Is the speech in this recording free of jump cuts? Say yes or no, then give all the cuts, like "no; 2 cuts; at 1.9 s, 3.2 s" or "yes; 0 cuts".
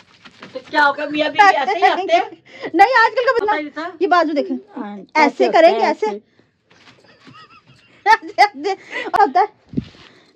no; 2 cuts; at 3.4 s, 9.1 s